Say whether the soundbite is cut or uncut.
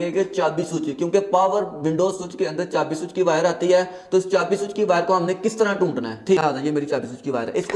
cut